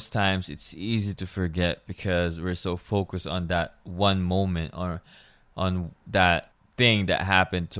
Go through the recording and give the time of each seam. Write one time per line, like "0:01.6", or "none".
0:06.6